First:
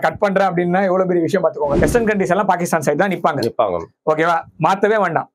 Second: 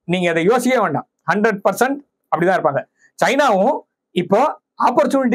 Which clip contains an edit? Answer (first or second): first